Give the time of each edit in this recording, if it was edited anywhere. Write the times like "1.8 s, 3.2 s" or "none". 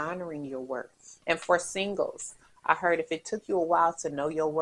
1.0 s